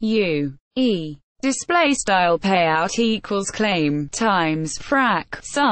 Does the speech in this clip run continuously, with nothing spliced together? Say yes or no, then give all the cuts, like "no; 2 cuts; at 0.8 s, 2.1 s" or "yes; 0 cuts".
no; 1 cut; at 1.2 s